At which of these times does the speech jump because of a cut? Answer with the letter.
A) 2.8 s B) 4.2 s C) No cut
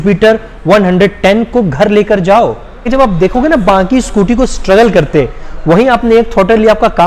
A